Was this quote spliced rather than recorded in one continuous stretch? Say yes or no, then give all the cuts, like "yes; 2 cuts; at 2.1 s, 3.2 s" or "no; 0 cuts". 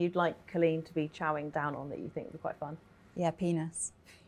yes; 1 cut; at 1.5 s